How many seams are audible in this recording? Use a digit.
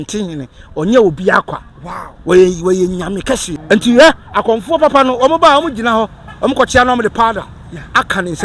1